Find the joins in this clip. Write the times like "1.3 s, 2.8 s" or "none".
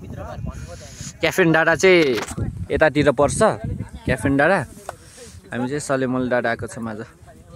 none